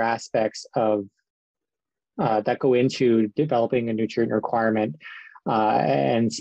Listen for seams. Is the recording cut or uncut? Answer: uncut